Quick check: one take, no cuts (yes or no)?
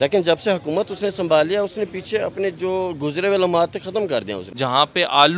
no